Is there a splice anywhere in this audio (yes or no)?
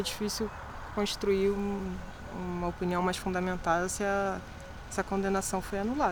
no